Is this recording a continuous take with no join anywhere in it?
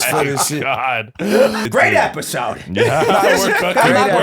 no; 1 cut; at 1.6 s

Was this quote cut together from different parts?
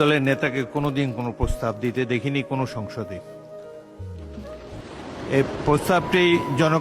yes; 2 cuts; at 3.0 s, 4.8 s

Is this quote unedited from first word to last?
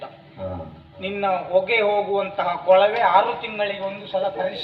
yes; 0 cuts

